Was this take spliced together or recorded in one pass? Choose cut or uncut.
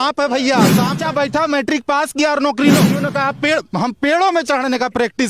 cut